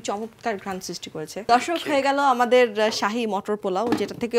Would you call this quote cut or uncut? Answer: cut